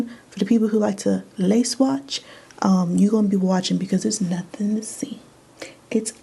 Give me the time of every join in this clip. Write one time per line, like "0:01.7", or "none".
none